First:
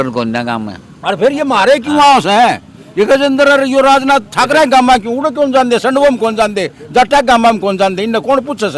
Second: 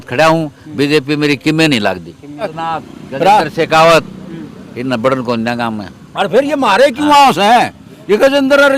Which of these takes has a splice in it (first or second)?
second